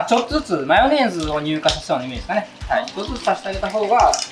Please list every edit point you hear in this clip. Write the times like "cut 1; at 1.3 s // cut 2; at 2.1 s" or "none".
none